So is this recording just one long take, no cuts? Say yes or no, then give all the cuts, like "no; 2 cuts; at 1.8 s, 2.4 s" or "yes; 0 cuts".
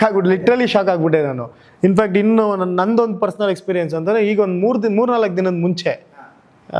yes; 0 cuts